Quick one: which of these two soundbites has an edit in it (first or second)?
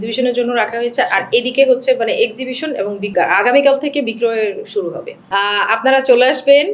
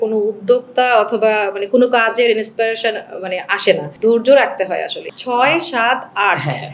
second